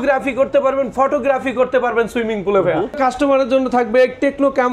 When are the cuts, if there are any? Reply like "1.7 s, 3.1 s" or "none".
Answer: 3.0 s